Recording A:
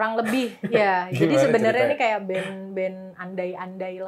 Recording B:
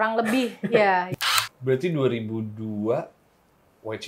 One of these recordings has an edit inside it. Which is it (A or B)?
B